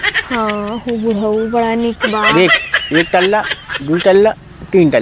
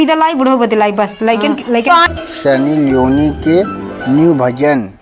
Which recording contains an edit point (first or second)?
second